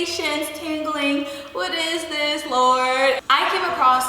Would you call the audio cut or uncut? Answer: cut